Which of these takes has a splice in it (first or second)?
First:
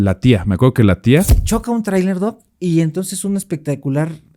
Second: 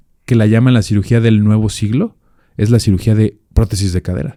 first